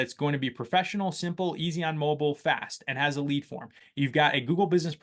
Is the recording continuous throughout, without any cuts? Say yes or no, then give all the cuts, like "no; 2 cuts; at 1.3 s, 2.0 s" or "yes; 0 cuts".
yes; 0 cuts